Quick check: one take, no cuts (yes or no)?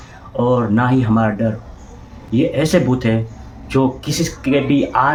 yes